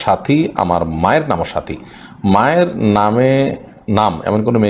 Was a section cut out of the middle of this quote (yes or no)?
no